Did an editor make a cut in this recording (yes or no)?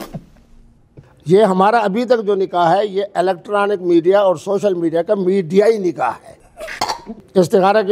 no